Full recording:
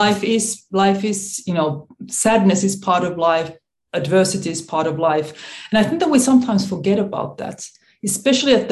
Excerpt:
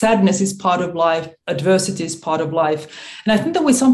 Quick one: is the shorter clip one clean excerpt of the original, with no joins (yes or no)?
no